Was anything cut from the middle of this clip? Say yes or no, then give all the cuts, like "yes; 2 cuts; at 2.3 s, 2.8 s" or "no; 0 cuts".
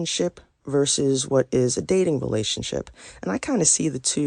no; 0 cuts